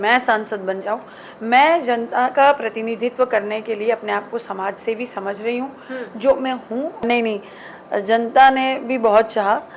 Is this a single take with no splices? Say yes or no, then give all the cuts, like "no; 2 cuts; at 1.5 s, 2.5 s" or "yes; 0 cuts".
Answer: no; 1 cut; at 7.0 s